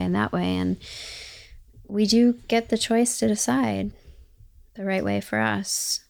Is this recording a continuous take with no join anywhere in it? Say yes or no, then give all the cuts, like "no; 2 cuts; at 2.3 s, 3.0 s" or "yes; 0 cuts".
yes; 0 cuts